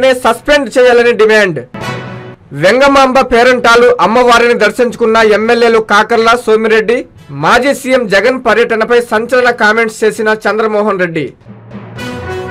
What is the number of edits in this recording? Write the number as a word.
one